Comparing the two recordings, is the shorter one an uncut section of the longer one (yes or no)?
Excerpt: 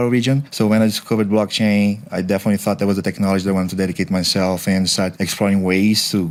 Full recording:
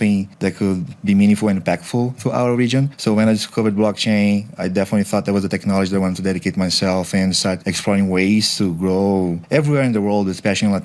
yes